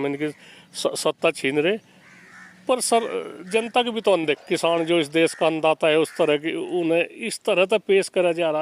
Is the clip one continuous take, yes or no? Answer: no